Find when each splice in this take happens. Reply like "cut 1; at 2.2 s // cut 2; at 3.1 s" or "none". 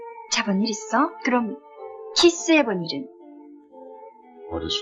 none